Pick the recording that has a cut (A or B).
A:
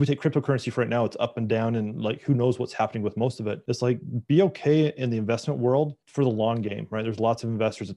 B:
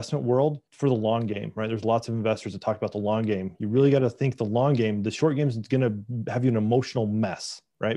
A